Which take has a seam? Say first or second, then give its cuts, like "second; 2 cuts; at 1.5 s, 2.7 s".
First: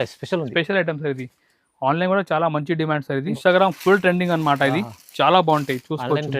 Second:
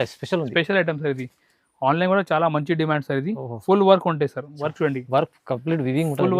first; 1 cut; at 3.4 s